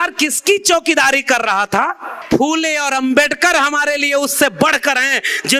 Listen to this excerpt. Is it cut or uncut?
cut